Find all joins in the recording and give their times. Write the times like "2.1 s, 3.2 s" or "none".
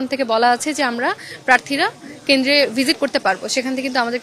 none